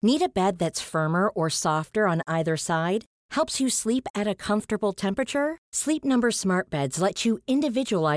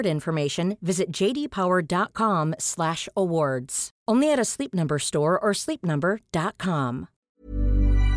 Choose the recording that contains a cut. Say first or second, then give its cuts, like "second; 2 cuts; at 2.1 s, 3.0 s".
second; 1 cut; at 7.1 s